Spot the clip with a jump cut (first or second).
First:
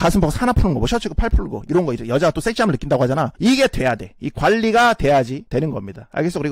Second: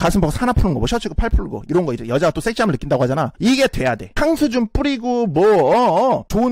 second